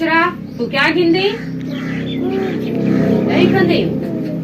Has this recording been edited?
yes; 1 cut; at 3.3 s

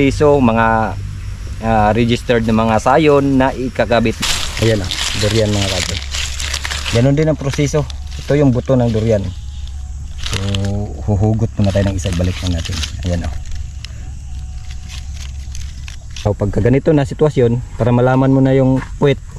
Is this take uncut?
no; 2 cuts; at 4.2 s, 16.3 s

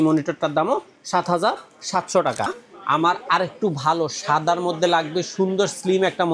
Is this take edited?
yes; 1 cut; at 2.6 s

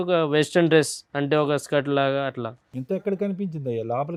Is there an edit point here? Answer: no; 0 cuts

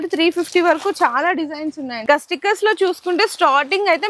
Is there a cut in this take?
yes; 1 cut; at 2.0 s

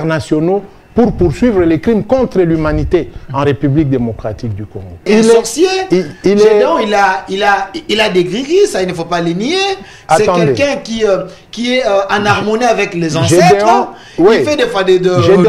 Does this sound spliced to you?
yes; 1 cut; at 5.1 s

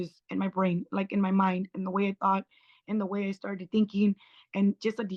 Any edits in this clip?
no; 0 cuts

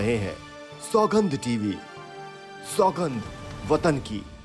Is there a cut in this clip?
no; 0 cuts

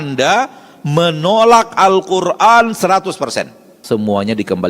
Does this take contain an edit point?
yes; 1 cut; at 3.8 s

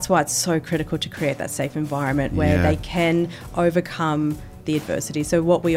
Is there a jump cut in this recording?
no; 0 cuts

